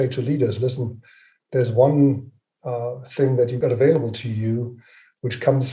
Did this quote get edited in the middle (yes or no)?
yes